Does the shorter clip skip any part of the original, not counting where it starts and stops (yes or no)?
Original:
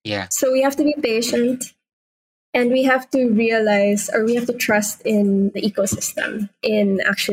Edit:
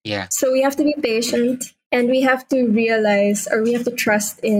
yes